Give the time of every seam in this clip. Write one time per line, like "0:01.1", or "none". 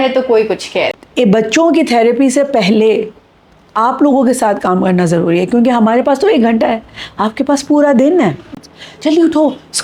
0:01.0
0:08.5